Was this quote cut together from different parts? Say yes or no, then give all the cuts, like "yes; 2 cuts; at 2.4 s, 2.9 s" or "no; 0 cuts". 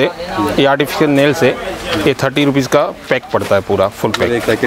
no; 0 cuts